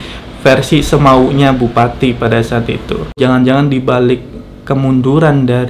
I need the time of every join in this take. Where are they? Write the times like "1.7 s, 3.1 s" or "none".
3.2 s